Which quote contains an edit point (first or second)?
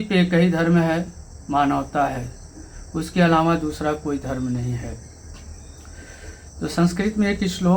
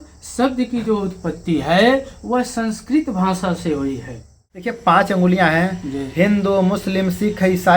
second